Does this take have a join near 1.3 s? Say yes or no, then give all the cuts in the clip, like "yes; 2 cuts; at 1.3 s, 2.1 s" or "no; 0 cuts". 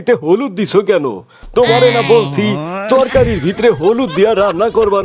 no; 0 cuts